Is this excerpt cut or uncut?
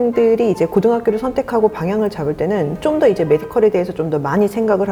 uncut